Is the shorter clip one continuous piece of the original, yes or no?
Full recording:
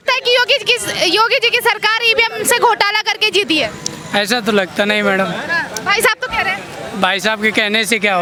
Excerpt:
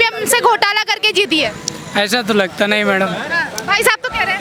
yes